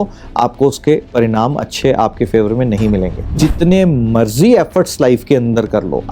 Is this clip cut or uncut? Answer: cut